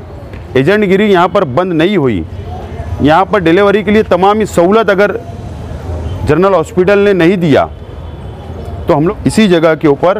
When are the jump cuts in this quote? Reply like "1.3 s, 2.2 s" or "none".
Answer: 9.1 s